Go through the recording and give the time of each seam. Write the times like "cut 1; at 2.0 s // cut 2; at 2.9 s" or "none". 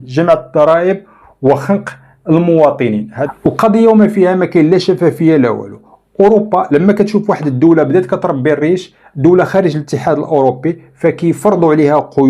cut 1; at 3.1 s

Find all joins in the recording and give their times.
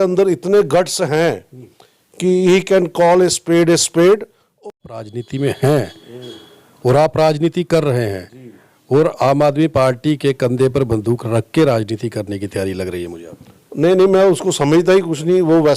cut 1; at 4.6 s

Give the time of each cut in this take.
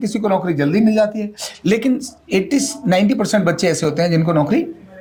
none

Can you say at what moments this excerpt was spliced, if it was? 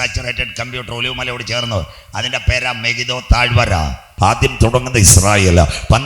cut 1; at 4.1 s

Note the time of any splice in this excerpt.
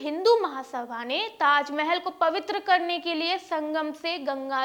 none

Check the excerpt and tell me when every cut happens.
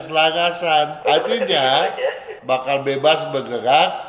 cut 1; at 0.9 s // cut 2; at 2.3 s

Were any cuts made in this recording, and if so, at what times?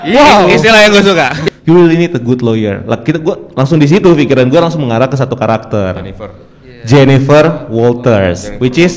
cut 1; at 1.3 s

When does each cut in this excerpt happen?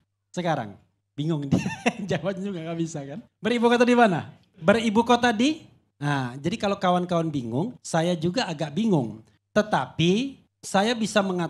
cut 1; at 3.2 s // cut 2; at 7.8 s

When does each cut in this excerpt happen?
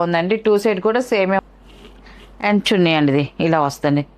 cut 1; at 1.4 s

